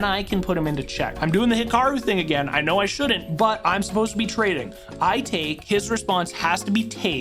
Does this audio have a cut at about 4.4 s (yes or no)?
no